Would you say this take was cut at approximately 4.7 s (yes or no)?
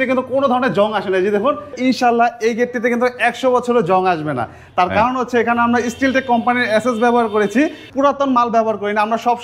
no